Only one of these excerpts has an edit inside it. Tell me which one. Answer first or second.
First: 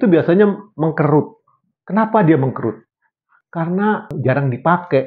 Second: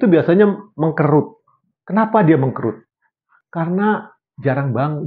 first